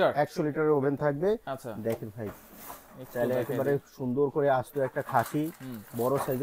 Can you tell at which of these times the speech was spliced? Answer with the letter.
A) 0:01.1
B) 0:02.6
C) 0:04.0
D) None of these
D